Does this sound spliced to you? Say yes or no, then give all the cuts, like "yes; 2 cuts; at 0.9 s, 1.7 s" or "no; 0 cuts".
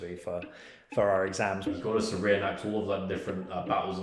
yes; 1 cut; at 1.6 s